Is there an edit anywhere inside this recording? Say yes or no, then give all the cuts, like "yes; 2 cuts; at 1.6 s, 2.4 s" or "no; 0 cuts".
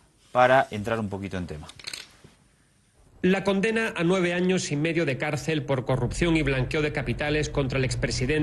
yes; 1 cut; at 4.7 s